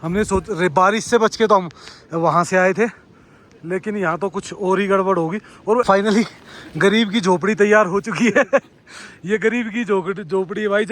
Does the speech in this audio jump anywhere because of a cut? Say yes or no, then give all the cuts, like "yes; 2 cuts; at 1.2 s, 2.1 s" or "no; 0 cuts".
yes; 1 cut; at 5.9 s